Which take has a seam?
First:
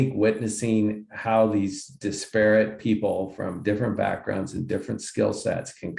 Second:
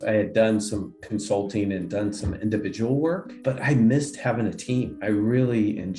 second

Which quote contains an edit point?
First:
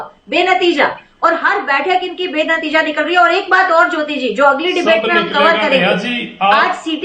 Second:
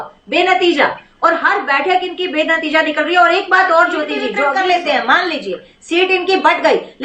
second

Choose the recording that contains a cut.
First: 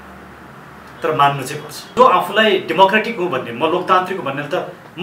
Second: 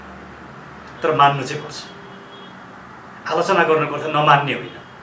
first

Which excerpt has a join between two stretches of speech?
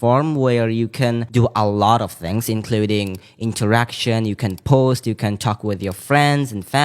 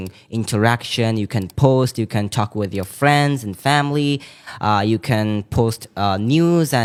first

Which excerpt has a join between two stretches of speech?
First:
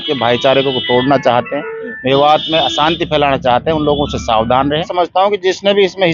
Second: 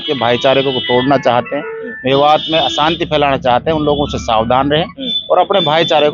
first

